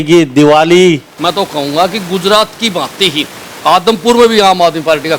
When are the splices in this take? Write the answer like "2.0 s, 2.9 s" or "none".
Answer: 1.1 s